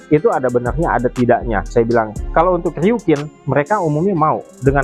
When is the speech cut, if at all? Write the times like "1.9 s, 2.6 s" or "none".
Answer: none